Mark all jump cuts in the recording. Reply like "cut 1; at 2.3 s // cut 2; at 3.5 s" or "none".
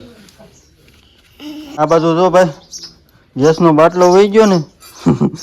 cut 1; at 1.6 s